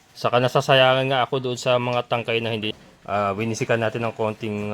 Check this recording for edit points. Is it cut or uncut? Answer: cut